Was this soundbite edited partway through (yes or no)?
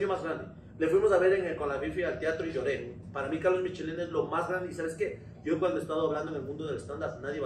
no